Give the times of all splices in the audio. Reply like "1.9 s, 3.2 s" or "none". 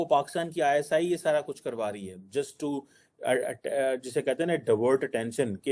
none